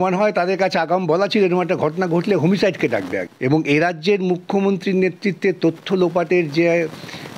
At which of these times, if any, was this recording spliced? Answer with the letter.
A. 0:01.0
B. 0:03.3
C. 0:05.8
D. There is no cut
B